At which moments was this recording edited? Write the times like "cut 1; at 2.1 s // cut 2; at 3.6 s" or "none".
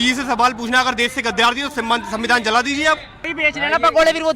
cut 1; at 3.3 s